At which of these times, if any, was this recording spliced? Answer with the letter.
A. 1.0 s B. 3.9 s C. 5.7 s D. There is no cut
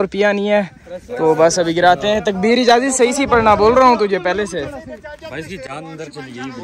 D